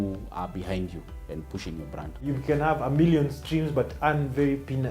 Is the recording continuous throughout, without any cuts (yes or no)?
no